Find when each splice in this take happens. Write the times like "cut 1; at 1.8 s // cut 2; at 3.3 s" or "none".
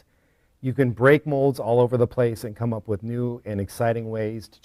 none